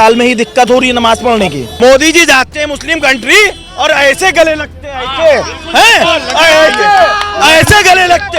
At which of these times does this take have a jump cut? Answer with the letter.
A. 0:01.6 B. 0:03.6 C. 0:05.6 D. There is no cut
A